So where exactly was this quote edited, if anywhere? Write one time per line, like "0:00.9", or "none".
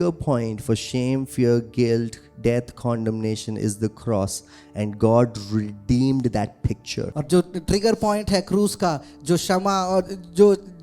0:07.2